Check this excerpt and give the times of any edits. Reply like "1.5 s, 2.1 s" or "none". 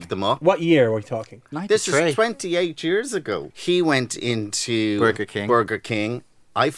3.5 s